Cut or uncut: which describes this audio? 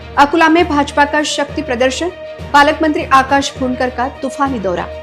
uncut